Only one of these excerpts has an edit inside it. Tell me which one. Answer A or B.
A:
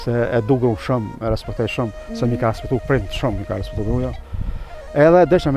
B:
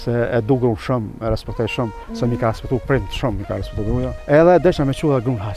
B